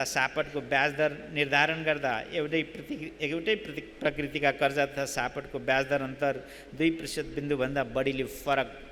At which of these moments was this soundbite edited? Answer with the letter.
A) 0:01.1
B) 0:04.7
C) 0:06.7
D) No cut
D